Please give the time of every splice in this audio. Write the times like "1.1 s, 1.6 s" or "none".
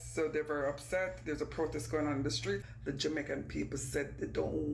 none

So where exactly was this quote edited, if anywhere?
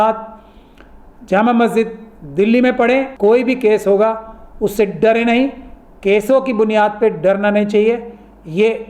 3.1 s

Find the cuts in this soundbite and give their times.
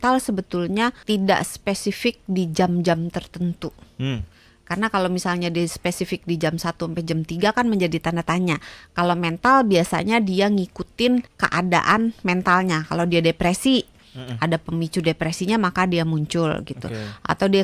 1.0 s, 11.4 s

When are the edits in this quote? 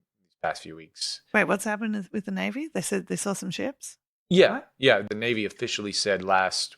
5.0 s

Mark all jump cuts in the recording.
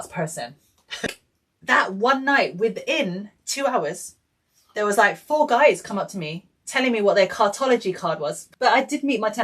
1.1 s, 8.4 s

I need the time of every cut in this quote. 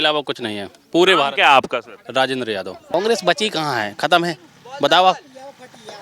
2.8 s

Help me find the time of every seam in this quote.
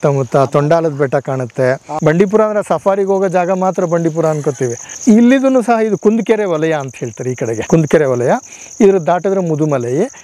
1.9 s, 4.9 s, 7.6 s

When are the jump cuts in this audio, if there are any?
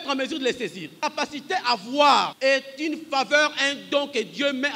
0.9 s, 2.3 s

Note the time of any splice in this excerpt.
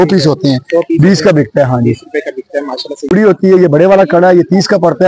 3.1 s

